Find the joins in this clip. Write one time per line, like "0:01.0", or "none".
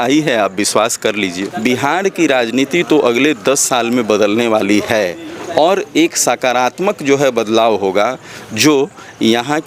0:01.5